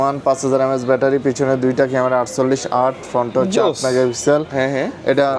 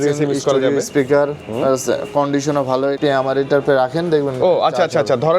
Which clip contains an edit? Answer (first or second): second